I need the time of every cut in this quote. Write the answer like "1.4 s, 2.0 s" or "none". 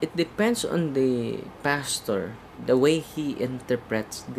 2.5 s